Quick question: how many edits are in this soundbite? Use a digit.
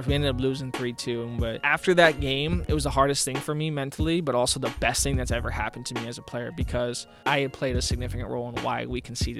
3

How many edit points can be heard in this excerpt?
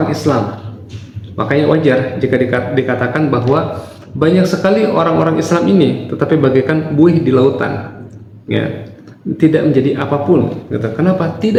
0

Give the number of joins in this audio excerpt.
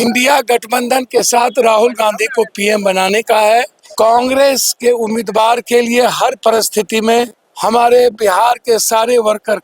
2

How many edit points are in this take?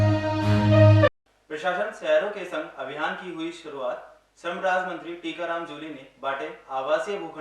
1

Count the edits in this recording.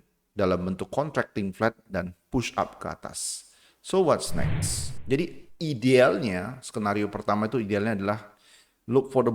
1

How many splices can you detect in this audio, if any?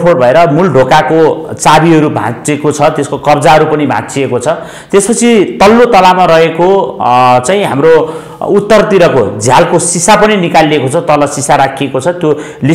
0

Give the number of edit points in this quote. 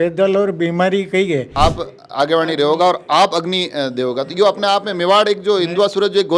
1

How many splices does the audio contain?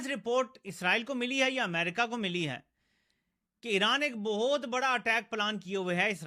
0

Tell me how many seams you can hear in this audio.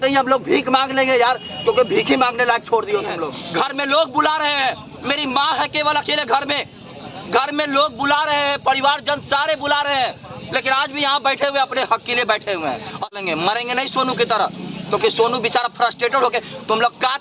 2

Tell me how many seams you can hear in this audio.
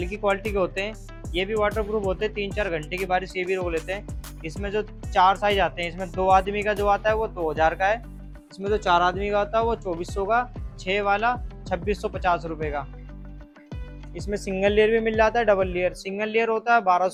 0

